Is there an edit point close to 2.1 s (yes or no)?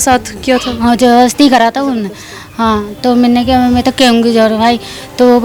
no